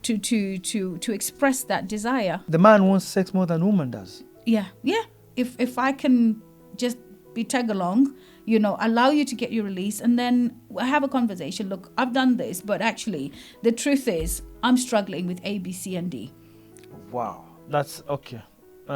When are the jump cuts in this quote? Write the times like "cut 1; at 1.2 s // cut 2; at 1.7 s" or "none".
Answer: cut 1; at 2.4 s // cut 2; at 5.2 s